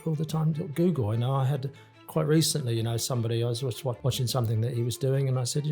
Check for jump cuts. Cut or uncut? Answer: cut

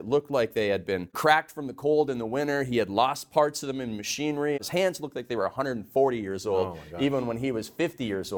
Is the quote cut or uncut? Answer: cut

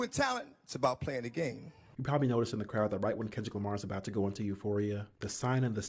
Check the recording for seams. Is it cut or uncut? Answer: uncut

